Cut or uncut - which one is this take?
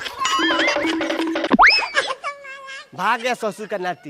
uncut